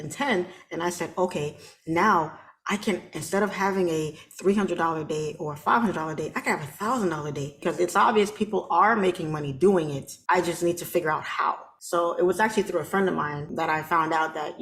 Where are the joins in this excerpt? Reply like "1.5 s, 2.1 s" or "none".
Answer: 7.6 s, 10.1 s, 11.7 s, 13.5 s